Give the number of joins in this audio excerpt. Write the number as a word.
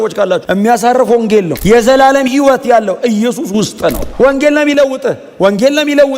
one